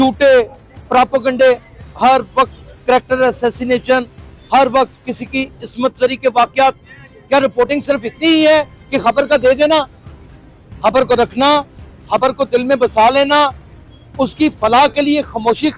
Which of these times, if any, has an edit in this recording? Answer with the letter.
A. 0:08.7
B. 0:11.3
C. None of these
C